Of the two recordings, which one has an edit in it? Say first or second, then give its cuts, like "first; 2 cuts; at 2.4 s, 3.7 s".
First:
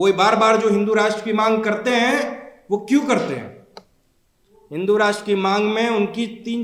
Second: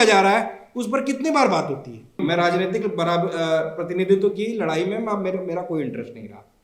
second; 1 cut; at 2.2 s